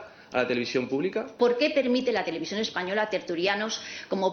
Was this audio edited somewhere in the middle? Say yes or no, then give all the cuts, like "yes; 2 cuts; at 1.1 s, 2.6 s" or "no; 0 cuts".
yes; 1 cut; at 1.3 s